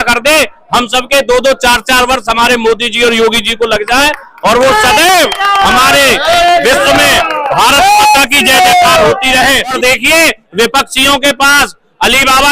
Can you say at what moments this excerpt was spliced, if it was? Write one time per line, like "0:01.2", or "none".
0:09.8